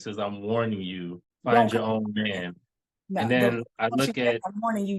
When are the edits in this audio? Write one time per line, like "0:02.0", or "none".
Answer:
0:01.2